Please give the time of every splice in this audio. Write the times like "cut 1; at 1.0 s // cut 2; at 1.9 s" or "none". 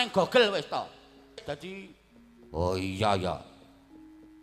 cut 1; at 1.4 s